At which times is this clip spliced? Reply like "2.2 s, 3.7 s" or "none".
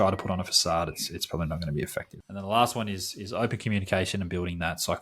2.2 s